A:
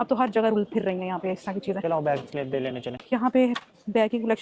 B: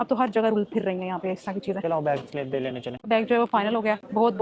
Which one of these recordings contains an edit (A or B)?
B